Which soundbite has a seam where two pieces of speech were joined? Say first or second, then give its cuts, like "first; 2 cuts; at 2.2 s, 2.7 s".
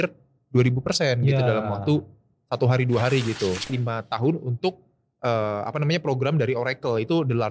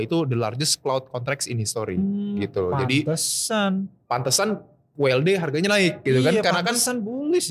first; 1 cut; at 3.7 s